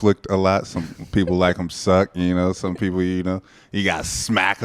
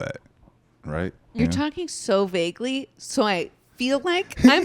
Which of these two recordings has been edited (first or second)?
second